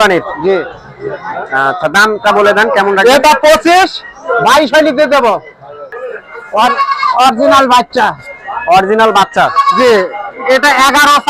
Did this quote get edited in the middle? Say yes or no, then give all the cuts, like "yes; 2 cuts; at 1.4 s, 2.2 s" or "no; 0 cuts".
yes; 1 cut; at 5.9 s